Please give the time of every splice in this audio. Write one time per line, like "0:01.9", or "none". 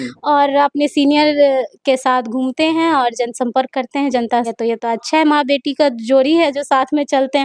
0:04.5